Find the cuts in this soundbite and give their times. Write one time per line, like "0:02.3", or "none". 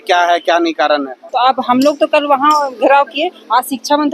0:01.2